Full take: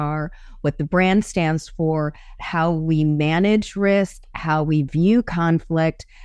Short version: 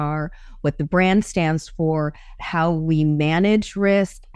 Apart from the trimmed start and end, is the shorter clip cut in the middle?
no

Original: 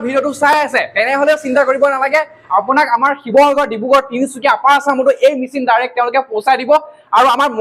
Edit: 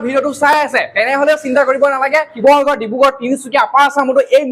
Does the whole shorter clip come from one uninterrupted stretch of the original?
no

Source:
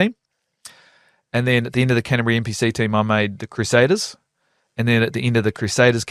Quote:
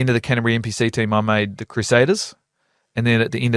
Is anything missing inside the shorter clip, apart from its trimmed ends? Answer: no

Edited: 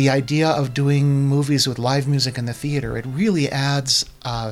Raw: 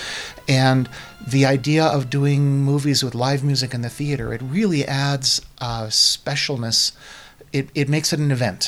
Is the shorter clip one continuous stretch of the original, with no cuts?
yes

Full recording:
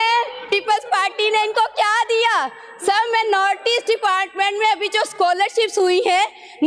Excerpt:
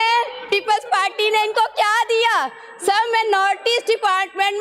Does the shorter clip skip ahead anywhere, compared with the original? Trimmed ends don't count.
no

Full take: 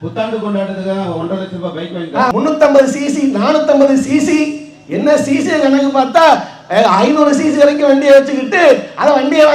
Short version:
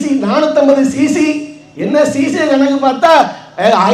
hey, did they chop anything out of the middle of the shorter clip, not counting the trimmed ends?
no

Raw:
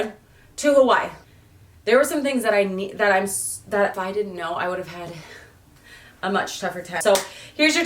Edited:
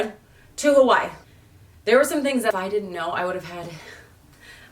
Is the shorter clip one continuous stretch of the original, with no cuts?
no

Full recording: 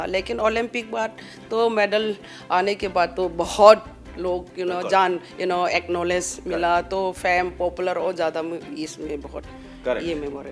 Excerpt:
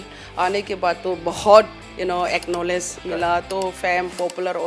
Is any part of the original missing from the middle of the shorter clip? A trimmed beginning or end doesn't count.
yes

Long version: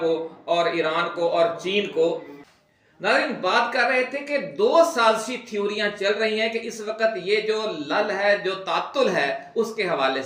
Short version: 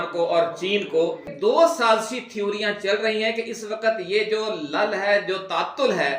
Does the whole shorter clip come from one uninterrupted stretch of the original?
no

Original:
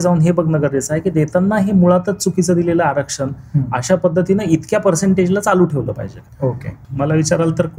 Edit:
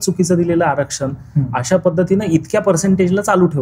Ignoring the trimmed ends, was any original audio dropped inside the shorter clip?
no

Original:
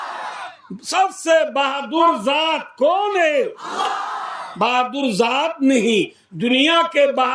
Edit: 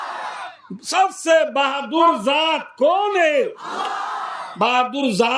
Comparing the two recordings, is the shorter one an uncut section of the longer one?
yes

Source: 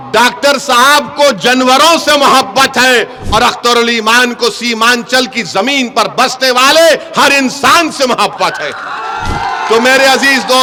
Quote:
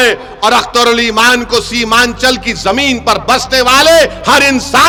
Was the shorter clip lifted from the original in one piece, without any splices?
yes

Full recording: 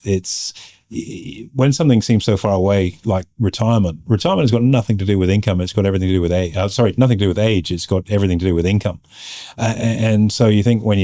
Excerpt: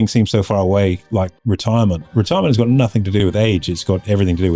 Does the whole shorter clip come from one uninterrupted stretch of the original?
no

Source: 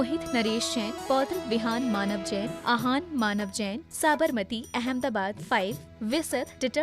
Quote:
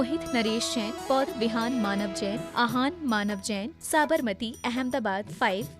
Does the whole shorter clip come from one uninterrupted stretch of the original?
no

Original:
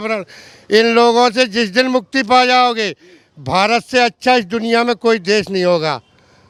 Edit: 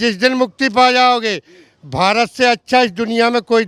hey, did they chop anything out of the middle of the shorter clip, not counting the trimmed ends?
no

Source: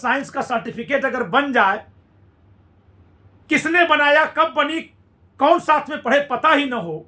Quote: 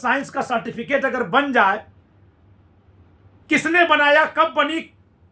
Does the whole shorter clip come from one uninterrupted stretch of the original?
yes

